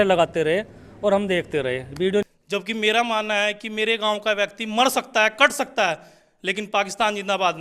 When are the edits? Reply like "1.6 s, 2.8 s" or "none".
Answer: 2.2 s